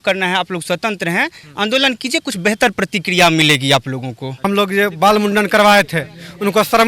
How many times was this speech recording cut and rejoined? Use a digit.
1